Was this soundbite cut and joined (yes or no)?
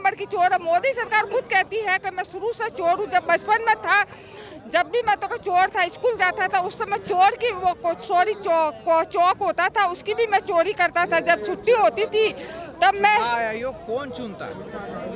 no